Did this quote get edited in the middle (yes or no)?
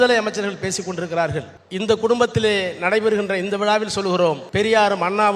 yes